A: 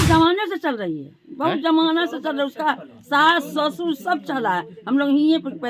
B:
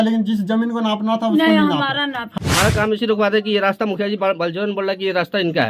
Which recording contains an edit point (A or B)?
B